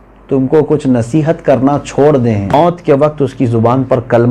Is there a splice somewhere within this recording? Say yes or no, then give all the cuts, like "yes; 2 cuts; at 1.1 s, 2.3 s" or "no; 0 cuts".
yes; 1 cut; at 2.5 s